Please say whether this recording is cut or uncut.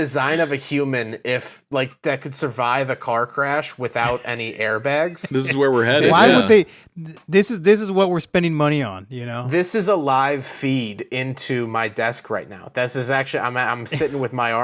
uncut